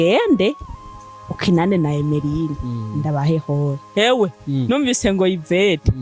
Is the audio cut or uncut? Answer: uncut